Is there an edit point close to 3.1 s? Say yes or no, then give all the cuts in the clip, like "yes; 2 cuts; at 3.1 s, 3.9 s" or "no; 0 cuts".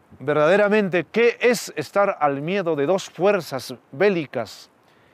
no; 1 cut; at 1.1 s